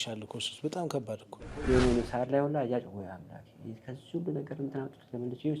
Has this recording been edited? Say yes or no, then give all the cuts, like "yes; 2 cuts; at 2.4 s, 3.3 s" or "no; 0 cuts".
yes; 1 cut; at 1.3 s